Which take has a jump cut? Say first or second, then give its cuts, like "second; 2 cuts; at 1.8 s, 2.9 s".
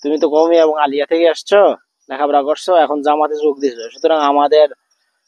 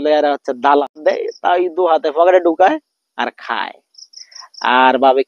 second; 1 cut; at 1.0 s